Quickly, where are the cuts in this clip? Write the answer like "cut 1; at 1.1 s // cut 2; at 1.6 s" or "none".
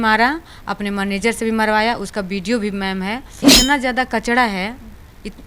cut 1; at 3.5 s